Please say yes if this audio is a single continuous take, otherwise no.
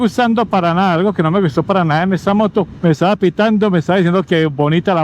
no